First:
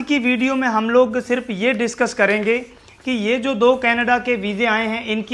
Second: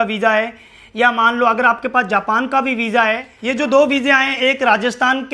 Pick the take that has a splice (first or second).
second